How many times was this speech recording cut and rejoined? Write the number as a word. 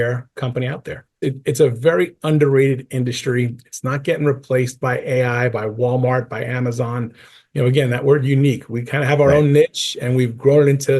one